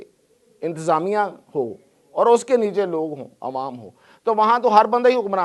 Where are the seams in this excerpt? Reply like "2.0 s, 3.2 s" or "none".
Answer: none